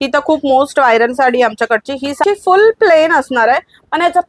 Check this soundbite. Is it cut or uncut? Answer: cut